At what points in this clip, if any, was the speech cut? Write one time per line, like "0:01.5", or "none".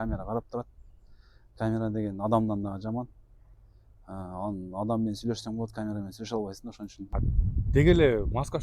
0:07.0